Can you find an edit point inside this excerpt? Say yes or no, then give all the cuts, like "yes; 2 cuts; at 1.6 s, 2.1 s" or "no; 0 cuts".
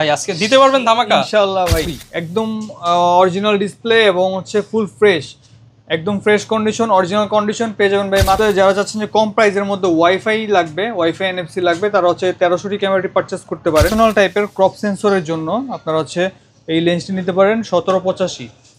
yes; 3 cuts; at 2.0 s, 8.4 s, 13.9 s